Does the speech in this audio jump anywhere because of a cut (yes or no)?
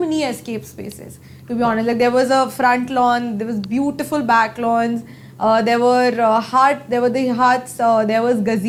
no